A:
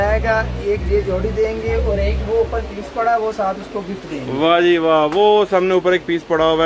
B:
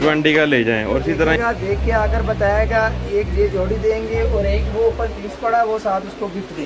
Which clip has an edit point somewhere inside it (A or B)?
B